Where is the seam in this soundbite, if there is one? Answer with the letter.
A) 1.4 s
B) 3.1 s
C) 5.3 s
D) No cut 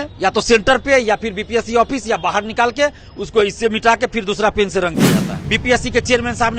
C